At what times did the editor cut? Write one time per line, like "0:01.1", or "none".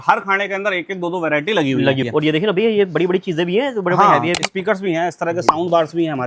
0:02.0